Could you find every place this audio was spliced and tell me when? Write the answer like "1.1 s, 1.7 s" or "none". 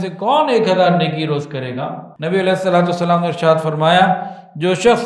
2.1 s

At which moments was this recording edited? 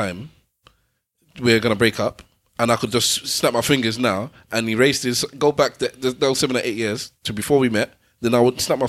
none

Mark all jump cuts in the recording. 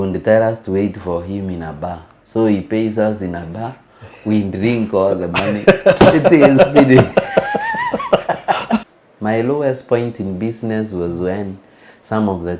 8.8 s

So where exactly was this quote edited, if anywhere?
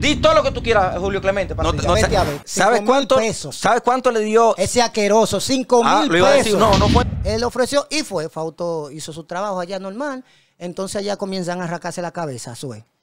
1.9 s, 7.1 s

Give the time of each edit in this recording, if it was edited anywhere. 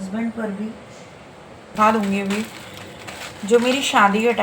1.7 s

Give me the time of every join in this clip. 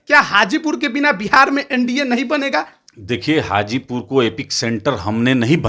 2.8 s

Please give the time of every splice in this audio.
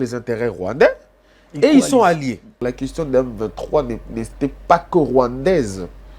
2.6 s

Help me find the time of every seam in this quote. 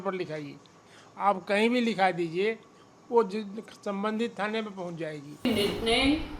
5.4 s

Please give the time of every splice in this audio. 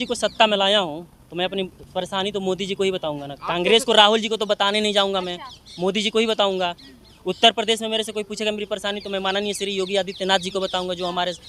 none

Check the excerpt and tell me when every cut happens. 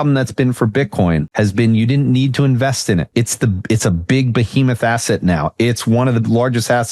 1.3 s, 3.1 s

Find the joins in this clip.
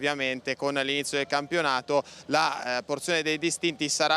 1.6 s

